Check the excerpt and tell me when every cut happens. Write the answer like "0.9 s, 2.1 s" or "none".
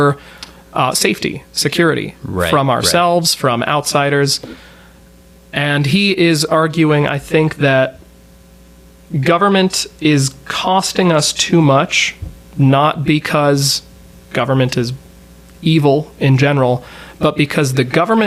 none